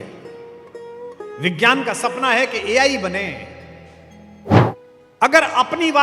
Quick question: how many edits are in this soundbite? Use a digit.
1